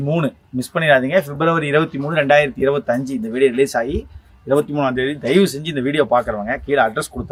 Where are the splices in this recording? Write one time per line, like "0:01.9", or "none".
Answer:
none